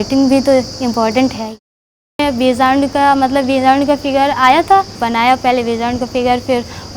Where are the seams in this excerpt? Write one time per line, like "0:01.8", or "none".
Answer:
0:01.7
0:05.0